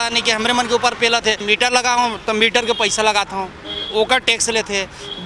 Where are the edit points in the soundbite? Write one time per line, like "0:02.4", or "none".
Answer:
0:01.4